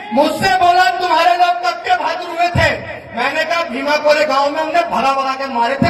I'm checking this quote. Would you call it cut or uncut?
uncut